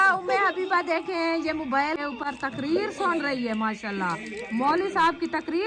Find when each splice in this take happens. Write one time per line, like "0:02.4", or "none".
none